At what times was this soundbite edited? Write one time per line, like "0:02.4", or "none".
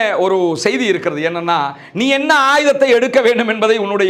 none